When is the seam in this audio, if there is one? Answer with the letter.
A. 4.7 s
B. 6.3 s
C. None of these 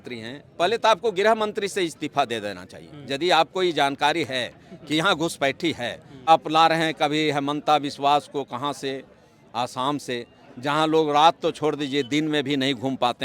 B